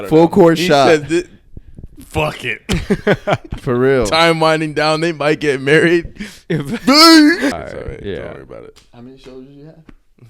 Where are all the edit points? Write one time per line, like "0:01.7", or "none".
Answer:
0:07.5